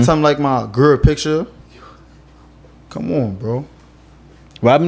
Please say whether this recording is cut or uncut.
uncut